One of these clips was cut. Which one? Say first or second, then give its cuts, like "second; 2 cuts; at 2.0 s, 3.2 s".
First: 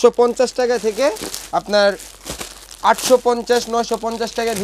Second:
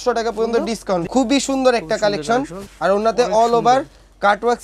second; 2 cuts; at 1.1 s, 2.6 s